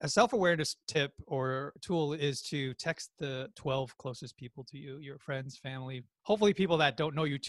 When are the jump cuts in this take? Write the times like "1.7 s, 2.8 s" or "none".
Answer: 1.3 s, 3.5 s